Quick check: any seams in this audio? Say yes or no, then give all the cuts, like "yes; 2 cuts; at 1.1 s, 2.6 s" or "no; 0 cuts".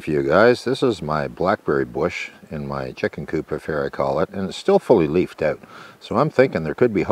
no; 0 cuts